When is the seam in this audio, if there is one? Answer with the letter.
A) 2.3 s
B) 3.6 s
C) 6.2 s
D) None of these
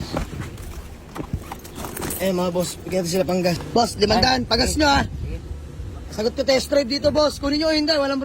B